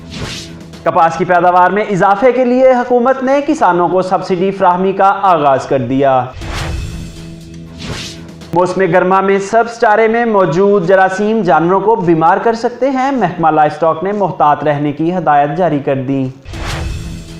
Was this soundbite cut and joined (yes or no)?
yes